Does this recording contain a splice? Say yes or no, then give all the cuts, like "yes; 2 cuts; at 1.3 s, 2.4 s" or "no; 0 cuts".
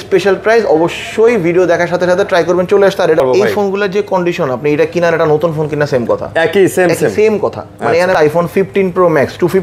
yes; 2 cuts; at 3.2 s, 8.2 s